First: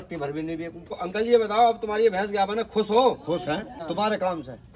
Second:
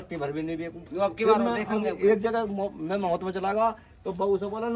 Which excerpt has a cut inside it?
first; 2 cuts; at 0.9 s, 3.8 s

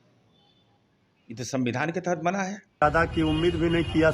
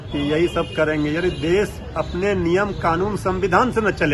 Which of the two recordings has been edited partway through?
first; 1 cut; at 2.8 s

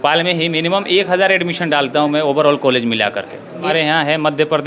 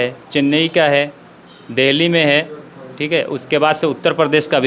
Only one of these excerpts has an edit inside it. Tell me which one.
first; 1 cut; at 3.7 s

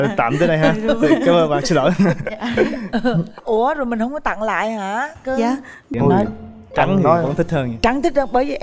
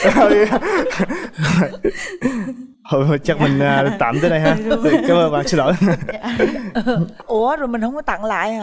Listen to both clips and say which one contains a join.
first; 1 cut; at 5.8 s

